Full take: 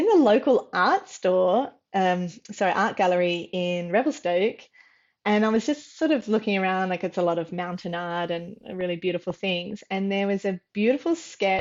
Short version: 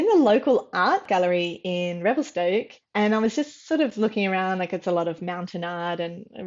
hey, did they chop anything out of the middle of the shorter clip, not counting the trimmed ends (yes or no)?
yes